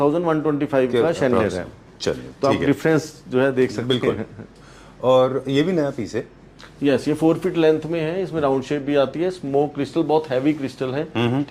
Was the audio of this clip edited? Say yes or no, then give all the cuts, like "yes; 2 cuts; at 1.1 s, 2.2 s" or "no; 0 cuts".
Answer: no; 0 cuts